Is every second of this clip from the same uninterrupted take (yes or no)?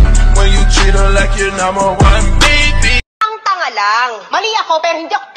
no